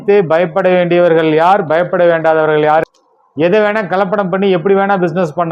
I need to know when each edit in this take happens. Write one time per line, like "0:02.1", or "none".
0:03.0